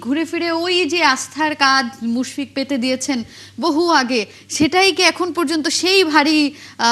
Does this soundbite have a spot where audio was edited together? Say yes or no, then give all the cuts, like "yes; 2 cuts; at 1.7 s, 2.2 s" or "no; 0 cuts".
no; 0 cuts